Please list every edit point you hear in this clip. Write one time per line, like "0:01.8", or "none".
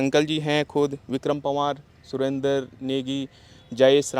none